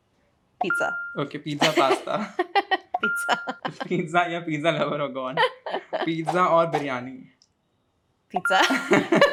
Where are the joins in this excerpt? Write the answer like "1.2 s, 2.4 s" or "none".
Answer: none